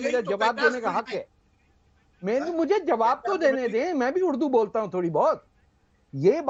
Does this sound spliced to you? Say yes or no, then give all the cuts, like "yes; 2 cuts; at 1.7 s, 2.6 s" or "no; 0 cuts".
no; 0 cuts